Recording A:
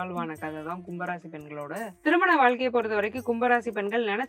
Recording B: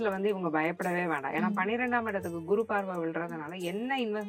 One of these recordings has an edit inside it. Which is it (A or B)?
A